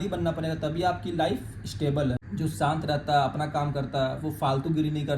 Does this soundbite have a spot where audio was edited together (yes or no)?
yes